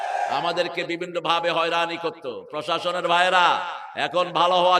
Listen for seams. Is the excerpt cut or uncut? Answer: uncut